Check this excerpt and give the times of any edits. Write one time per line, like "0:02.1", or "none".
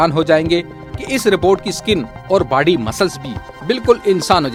none